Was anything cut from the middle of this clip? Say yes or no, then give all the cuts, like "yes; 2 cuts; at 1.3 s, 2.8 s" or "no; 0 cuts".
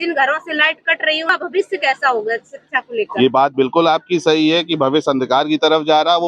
yes; 1 cut; at 1.3 s